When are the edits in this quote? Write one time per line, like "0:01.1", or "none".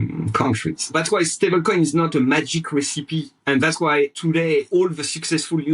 0:00.9
0:03.3
0:04.6